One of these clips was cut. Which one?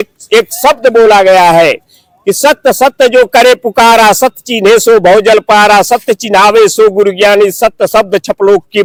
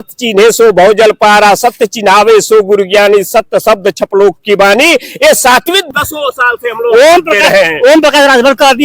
second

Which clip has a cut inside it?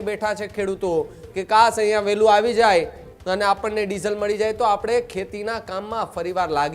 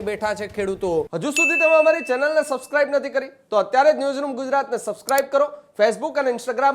second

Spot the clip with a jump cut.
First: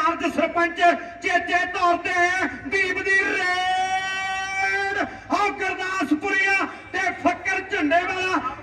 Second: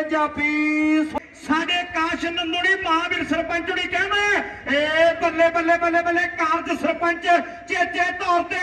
second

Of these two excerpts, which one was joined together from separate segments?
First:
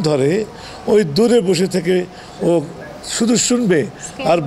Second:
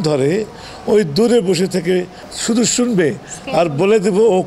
second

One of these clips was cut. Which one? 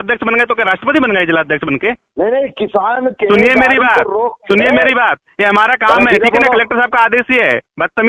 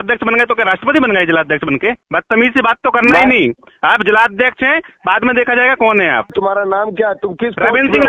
second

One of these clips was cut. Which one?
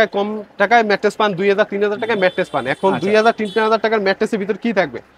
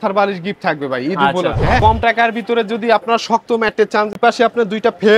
second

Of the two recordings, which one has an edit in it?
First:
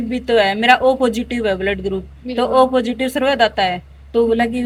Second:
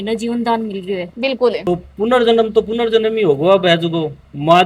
second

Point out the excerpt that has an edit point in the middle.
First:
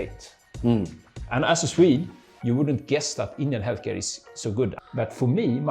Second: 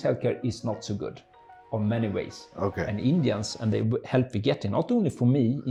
first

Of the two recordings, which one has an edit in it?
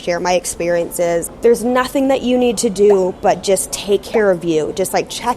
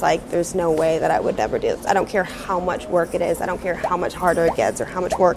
first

